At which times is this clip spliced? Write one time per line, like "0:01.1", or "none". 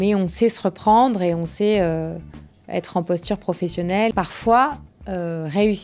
0:04.1